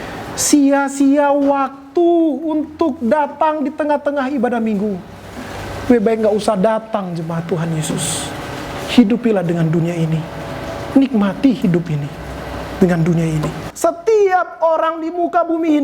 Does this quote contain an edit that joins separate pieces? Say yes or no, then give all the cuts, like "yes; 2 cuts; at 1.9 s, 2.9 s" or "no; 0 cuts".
yes; 1 cut; at 13.6 s